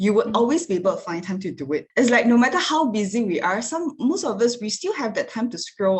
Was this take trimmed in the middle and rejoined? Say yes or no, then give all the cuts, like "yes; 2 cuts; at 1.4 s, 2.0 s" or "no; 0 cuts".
no; 0 cuts